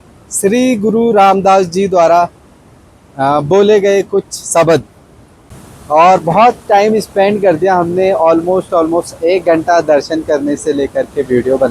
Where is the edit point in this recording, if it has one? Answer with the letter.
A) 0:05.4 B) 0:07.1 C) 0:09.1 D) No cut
A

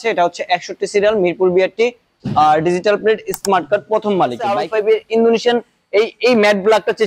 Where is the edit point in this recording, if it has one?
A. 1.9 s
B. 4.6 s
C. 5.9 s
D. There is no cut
B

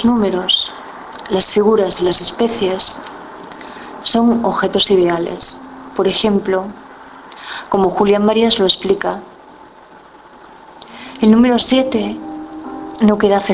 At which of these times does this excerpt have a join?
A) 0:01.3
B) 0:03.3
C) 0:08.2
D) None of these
D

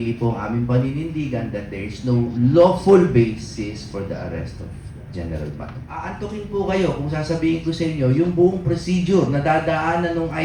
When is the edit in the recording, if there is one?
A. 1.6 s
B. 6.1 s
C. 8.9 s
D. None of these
B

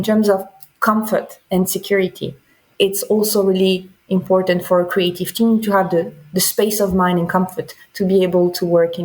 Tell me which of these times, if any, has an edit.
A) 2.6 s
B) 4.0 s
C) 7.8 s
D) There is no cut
A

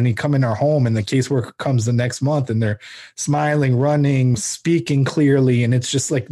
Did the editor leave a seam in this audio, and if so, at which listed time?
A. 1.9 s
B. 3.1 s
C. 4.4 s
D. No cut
C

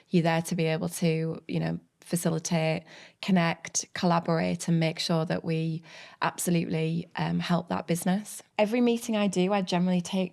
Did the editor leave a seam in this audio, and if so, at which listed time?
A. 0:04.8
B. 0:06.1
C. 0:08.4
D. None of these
C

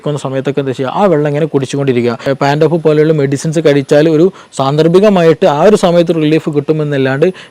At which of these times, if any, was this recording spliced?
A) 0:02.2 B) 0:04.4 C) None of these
A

